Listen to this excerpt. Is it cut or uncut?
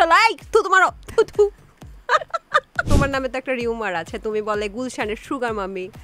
cut